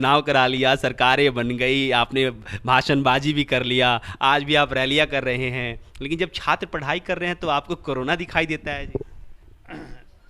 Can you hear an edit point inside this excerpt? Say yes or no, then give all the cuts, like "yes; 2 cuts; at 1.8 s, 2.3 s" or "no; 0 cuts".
no; 0 cuts